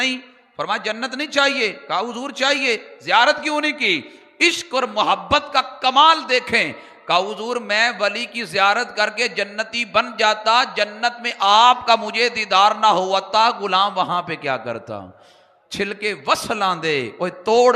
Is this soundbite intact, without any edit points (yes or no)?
yes